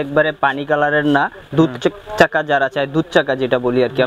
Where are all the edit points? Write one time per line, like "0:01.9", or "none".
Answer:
none